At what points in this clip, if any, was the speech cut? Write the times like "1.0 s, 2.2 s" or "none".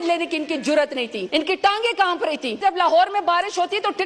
1.2 s, 2.6 s

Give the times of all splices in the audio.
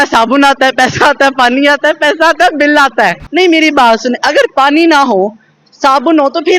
3.2 s

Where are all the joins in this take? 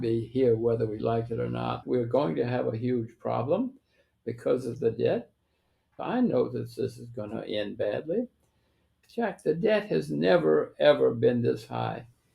1.8 s, 6.0 s, 9.0 s

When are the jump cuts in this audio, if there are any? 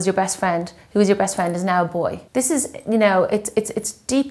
2.2 s

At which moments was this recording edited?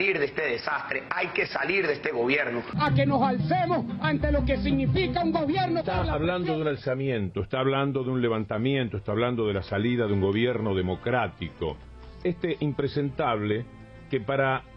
2.7 s

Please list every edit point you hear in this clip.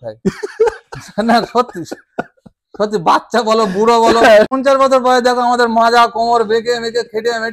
4.5 s

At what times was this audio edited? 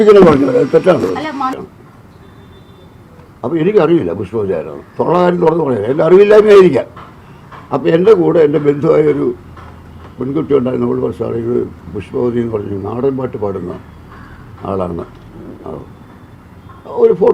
1.6 s

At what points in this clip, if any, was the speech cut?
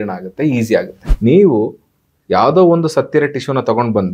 1.0 s

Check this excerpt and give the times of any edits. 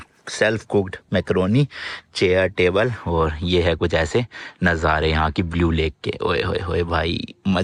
none

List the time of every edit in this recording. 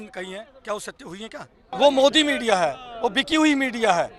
1.7 s

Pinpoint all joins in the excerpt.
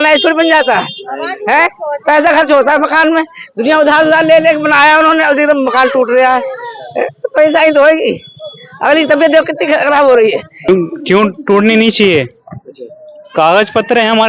10.7 s

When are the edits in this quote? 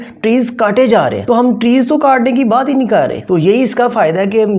1.2 s, 3.2 s

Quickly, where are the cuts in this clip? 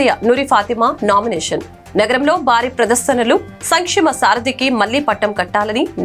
none

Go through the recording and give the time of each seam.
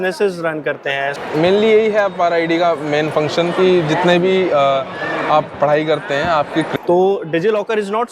1.1 s, 6.7 s

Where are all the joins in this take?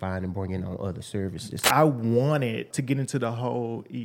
1.6 s, 2.7 s

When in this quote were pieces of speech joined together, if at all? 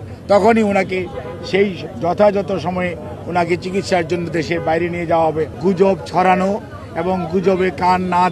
5.5 s

